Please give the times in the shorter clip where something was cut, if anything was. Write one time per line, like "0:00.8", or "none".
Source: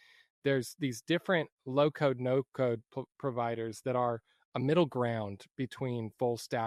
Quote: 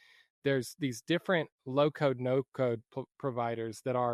none